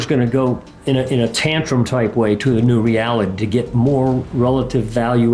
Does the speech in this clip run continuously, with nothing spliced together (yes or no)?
yes